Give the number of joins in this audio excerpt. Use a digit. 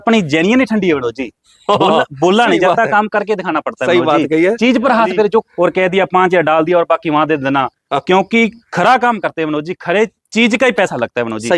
1